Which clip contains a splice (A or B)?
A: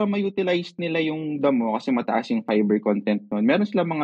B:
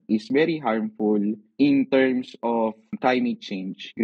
B